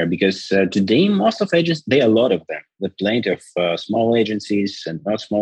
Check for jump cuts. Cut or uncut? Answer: uncut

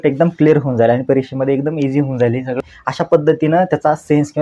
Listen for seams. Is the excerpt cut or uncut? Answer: cut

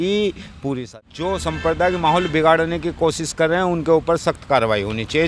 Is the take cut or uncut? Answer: cut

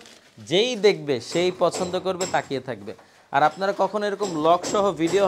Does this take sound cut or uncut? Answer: uncut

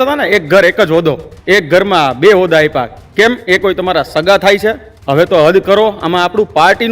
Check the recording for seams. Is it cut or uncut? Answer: cut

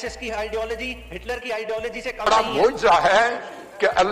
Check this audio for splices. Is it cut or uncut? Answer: cut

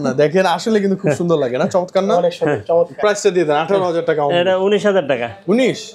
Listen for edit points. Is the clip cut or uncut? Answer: uncut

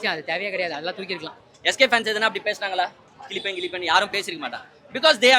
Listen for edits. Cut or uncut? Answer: cut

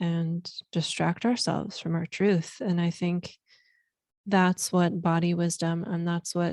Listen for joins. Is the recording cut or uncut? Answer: uncut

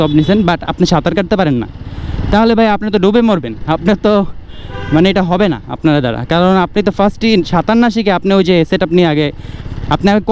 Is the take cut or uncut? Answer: uncut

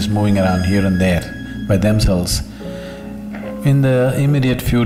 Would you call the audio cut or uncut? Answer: uncut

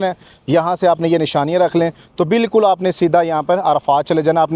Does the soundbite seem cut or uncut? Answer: uncut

